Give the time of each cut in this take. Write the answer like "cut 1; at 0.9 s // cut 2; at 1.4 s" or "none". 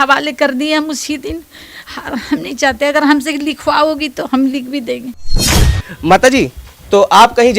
cut 1; at 5.6 s